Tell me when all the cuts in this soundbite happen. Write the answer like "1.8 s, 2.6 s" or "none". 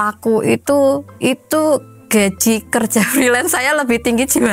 none

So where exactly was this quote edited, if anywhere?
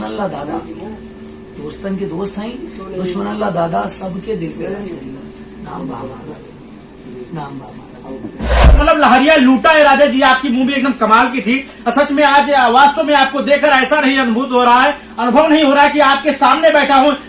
8.8 s

